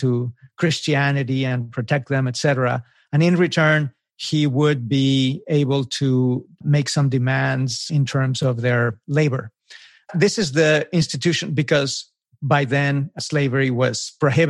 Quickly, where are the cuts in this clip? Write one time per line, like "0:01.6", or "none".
0:06.6
0:07.9
0:10.1
0:13.2